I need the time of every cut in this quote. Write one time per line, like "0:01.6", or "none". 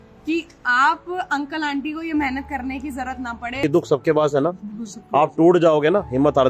0:03.6